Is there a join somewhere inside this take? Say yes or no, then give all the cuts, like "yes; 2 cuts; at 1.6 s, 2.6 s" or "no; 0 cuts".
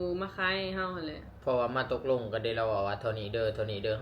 yes; 1 cut; at 1.3 s